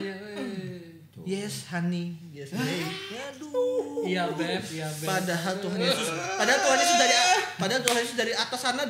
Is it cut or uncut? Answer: uncut